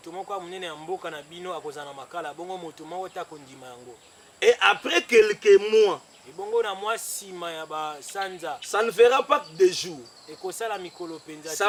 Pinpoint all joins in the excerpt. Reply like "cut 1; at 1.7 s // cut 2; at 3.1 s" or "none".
none